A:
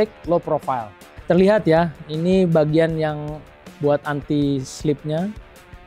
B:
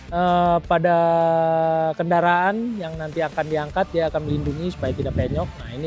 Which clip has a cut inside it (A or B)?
A